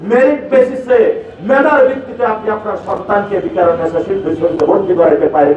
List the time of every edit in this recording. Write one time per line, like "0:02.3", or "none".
none